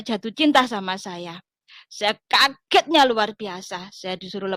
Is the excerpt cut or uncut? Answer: uncut